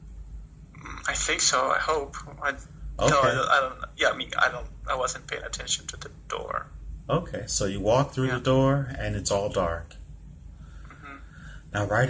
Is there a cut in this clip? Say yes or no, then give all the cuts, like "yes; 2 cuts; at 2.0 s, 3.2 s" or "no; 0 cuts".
yes; 1 cut; at 4.7 s